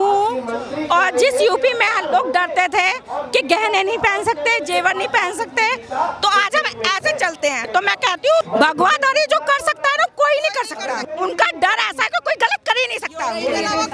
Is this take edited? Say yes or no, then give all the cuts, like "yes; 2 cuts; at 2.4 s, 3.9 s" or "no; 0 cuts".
yes; 3 cuts; at 7.7 s, 8.5 s, 11.0 s